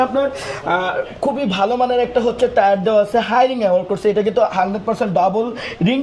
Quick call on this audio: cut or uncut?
uncut